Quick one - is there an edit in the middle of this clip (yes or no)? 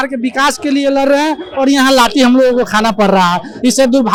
no